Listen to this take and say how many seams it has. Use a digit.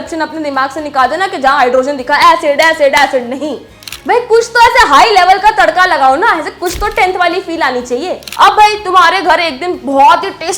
2